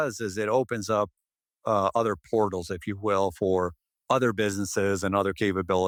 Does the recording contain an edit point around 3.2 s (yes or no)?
no